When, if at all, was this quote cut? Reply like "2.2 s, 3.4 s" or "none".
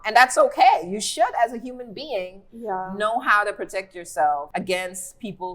4.5 s